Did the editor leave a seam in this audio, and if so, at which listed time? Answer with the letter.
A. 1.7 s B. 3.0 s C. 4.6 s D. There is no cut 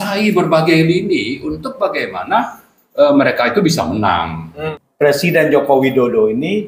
C